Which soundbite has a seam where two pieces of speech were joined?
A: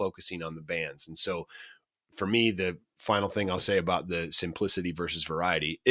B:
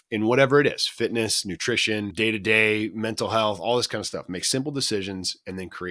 B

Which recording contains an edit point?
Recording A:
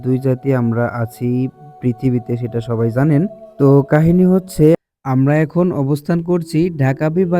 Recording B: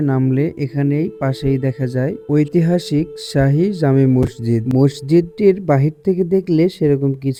A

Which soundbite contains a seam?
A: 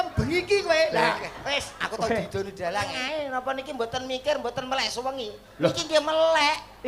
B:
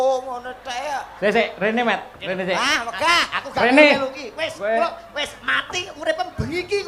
A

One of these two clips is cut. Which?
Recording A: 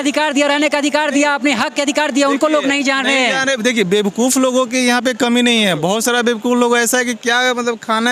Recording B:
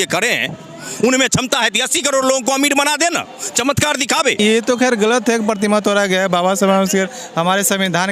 B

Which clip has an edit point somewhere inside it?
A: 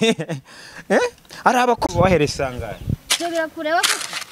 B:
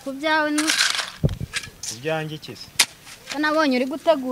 A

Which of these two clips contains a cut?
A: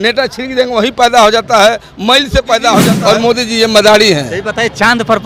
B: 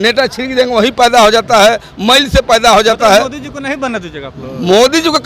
A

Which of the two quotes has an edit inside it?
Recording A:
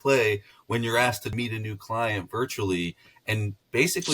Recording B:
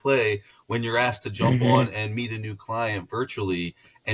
A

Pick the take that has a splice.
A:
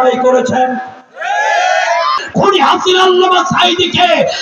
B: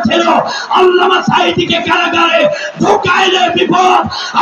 A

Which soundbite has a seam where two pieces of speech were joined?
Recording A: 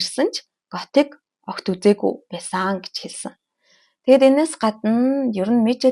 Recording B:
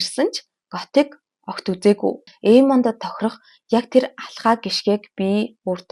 B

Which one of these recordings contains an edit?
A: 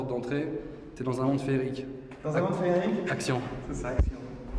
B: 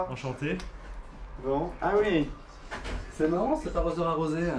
B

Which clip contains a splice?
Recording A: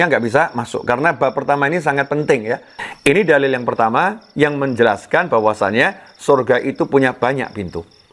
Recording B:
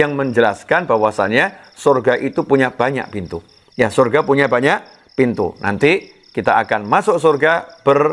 A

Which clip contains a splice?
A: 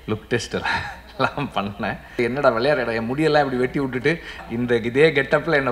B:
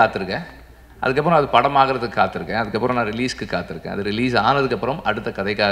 A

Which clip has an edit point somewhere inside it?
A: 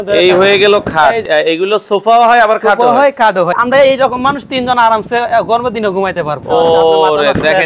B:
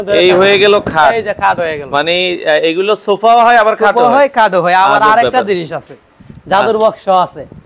A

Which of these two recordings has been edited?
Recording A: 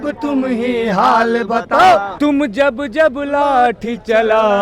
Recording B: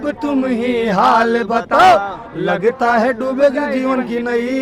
A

